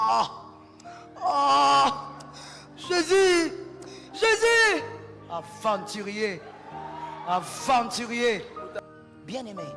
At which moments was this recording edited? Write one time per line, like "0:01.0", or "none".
0:08.6